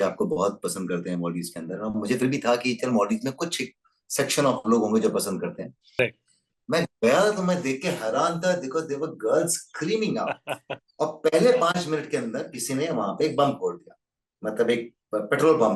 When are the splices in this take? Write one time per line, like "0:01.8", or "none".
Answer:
0:06.0